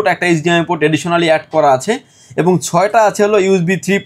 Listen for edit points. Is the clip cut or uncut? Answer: uncut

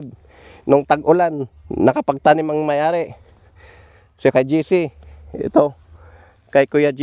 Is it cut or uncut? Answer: uncut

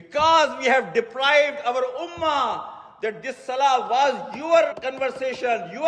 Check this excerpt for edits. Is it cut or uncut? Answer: uncut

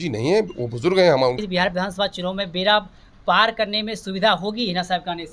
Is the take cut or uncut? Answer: cut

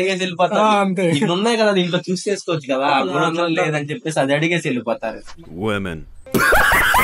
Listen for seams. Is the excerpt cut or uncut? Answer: uncut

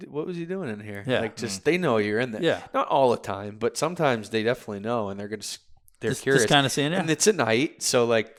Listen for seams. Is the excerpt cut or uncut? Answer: uncut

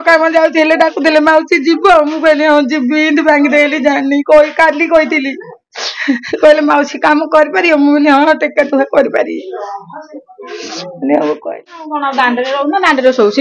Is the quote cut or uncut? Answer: cut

